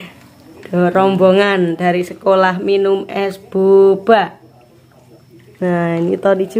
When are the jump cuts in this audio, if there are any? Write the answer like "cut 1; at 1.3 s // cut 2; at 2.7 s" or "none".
none

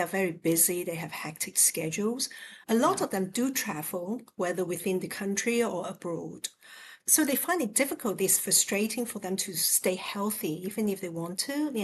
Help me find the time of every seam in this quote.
cut 1; at 7.0 s

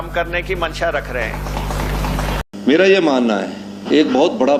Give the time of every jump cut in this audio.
cut 1; at 2.4 s

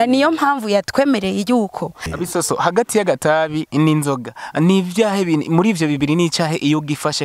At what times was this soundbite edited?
cut 1; at 2.1 s

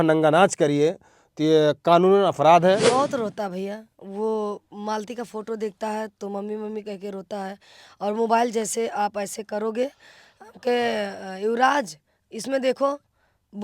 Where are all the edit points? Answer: cut 1; at 2.9 s

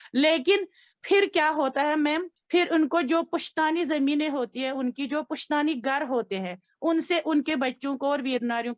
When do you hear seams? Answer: cut 1; at 2.3 s

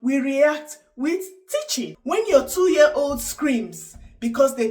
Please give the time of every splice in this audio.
cut 1; at 1.9 s

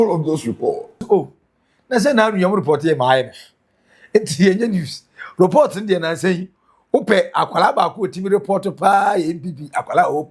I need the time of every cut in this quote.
cut 1; at 0.9 s

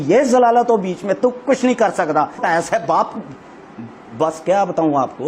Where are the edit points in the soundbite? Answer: cut 1; at 2.4 s

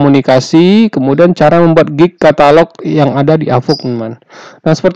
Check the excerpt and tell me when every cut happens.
none

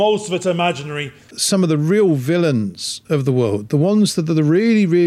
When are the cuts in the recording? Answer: cut 1; at 1.3 s

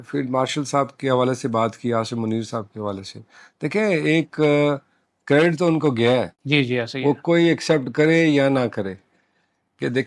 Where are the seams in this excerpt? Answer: cut 1; at 6.4 s

